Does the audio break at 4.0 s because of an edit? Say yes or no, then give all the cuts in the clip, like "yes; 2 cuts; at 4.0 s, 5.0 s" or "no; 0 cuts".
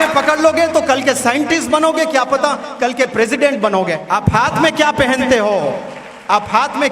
yes; 1 cut; at 4.0 s